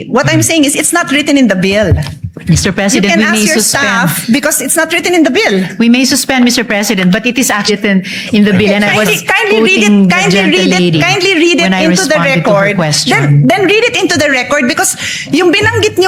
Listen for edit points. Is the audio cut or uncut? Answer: uncut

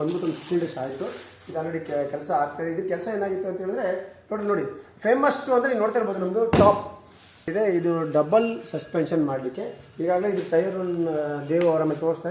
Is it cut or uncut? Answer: cut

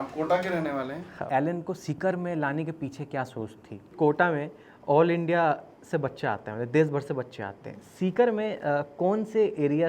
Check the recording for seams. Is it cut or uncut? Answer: cut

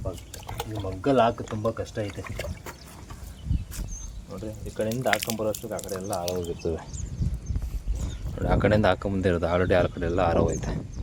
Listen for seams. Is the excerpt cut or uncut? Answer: uncut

